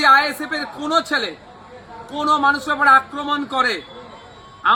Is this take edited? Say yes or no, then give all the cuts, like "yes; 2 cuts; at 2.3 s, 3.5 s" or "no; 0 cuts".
no; 0 cuts